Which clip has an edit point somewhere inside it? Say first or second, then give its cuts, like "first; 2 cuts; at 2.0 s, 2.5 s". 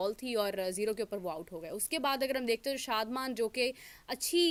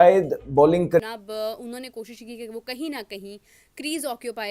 second; 1 cut; at 1.0 s